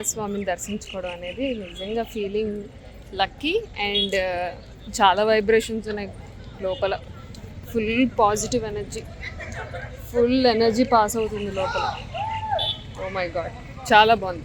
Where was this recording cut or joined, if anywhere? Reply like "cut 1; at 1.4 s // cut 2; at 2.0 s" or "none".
none